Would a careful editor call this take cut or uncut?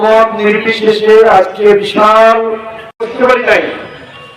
cut